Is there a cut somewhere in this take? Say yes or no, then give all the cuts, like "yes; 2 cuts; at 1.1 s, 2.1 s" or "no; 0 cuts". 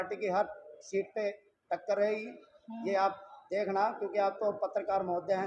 no; 0 cuts